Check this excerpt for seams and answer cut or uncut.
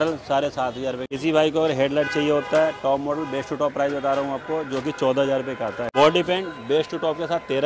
cut